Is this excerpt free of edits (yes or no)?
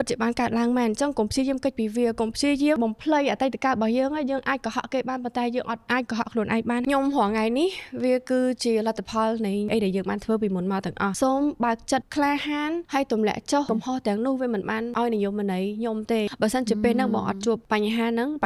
no